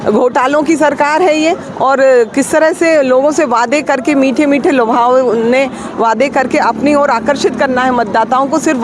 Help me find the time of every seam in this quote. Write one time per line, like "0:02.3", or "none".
none